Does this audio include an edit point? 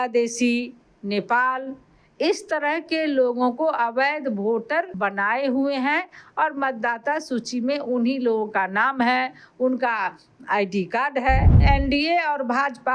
yes; 2 cuts; at 4.9 s, 11.5 s

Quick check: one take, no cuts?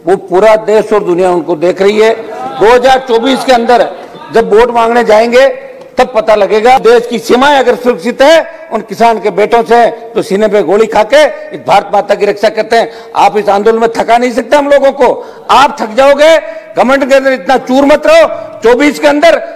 no; 1 cut; at 6.8 s

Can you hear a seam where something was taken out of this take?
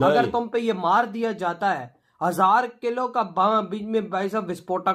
no; 0 cuts

